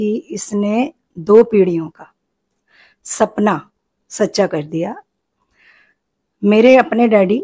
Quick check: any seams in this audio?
no; 0 cuts

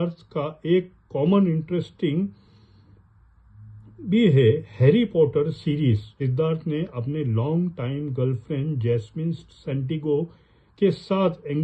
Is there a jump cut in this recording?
yes; 1 cut; at 6.2 s

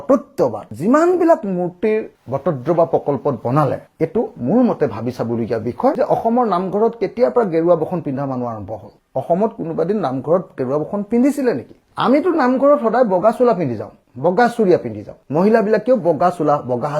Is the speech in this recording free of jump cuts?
no; 1 cut; at 6.0 s

